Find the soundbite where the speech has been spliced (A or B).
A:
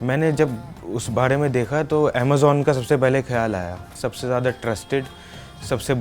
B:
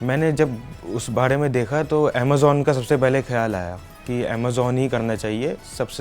A